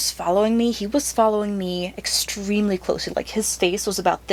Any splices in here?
no; 0 cuts

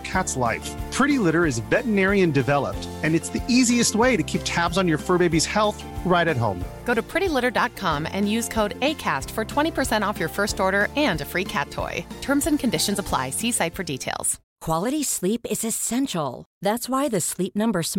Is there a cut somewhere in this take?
yes; 1 cut; at 14.5 s

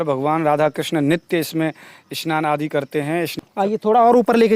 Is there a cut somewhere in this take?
yes; 1 cut; at 3.4 s

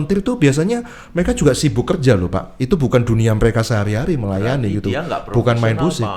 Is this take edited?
no; 0 cuts

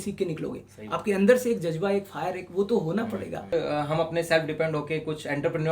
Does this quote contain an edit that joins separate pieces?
yes; 1 cut; at 3.5 s

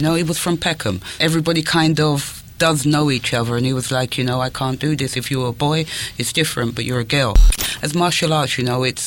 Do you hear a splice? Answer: yes; 1 cut; at 7.5 s

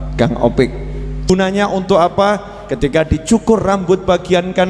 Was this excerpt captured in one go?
no; 1 cut; at 1.3 s

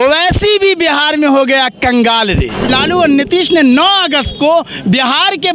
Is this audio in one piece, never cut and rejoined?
no; 1 cut; at 2.7 s

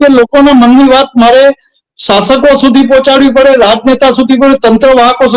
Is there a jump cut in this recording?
no; 0 cuts

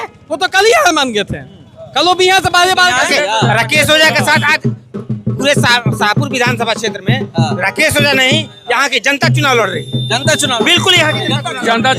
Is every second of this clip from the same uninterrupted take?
no; 1 cut; at 3.1 s

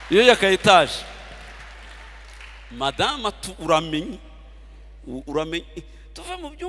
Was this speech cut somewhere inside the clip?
no; 0 cuts

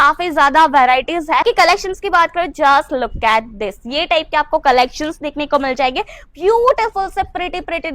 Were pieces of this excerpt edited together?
yes; 1 cut; at 1.4 s

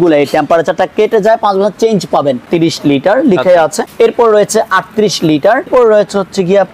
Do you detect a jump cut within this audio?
yes; 3 cuts; at 2.4 s, 3.8 s, 5.7 s

